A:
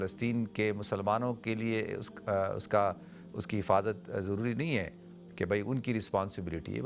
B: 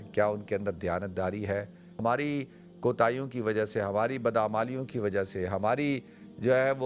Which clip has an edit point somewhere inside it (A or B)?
B